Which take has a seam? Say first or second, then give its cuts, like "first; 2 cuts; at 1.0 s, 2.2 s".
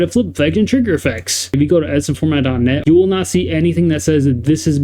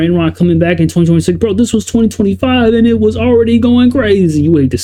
first; 2 cuts; at 1.5 s, 2.8 s